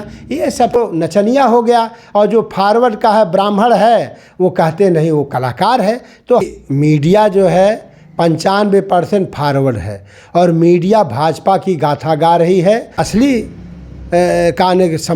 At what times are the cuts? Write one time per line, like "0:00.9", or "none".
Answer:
0:00.7
0:06.5
0:13.0